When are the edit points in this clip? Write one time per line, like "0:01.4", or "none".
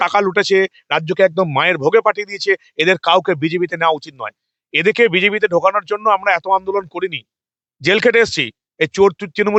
none

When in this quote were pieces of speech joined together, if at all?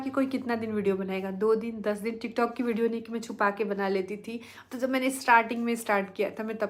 none

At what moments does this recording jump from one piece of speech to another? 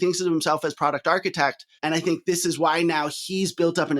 0:01.7

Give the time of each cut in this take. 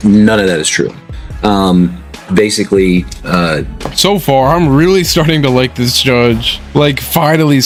none

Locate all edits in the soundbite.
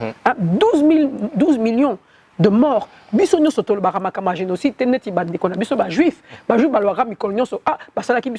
none

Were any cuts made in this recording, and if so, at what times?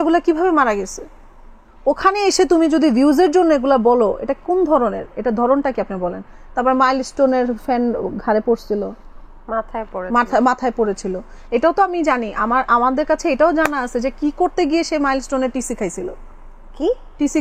none

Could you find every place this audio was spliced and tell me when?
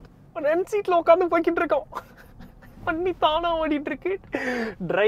none

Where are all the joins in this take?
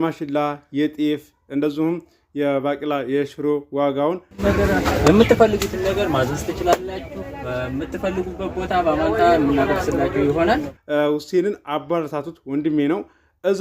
0:04.4
0:10.7

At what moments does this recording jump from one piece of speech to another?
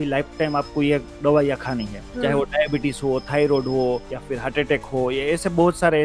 0:02.0
0:04.1

